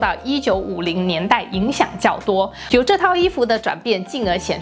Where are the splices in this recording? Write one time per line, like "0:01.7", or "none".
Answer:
0:02.6